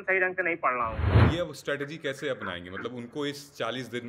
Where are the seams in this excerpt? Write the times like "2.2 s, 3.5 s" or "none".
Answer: 1.1 s